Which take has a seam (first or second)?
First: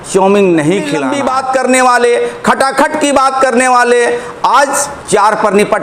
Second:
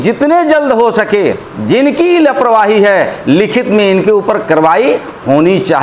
first